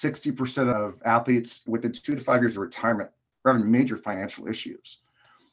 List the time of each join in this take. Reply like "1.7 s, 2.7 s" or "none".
0.7 s, 1.6 s